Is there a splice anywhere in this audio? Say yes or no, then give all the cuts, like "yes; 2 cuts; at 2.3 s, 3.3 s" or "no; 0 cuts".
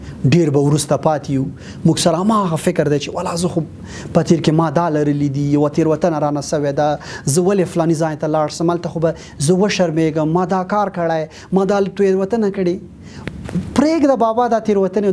no; 0 cuts